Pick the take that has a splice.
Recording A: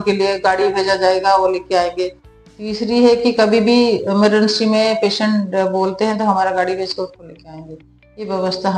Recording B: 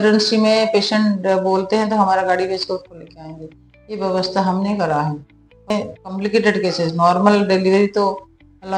B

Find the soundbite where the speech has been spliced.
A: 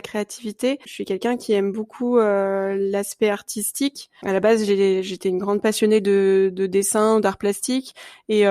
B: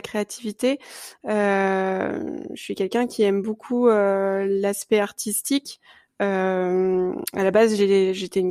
A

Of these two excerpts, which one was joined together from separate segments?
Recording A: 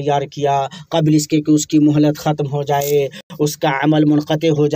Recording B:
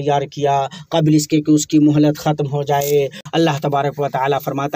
B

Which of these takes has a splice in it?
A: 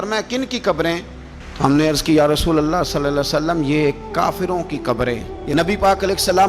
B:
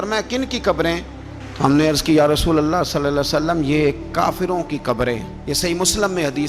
A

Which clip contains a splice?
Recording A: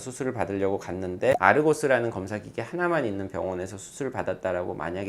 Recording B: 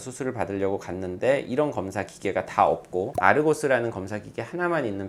A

